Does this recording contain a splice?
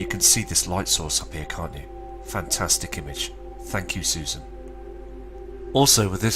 no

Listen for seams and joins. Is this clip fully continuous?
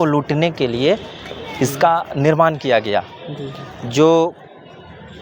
yes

